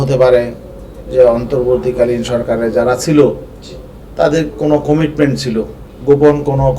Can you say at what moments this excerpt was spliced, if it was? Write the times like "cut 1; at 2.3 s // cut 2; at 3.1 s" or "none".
cut 1; at 5.8 s